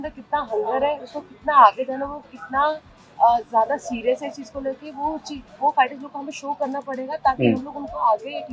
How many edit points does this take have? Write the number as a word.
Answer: zero